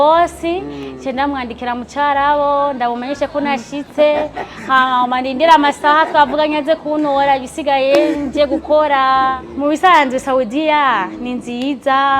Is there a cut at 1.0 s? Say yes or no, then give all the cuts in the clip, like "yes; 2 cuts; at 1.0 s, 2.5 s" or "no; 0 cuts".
no; 1 cut; at 9.5 s